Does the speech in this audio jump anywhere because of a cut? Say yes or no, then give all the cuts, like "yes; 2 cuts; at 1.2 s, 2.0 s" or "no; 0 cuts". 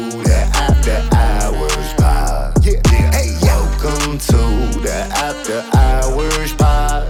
no; 0 cuts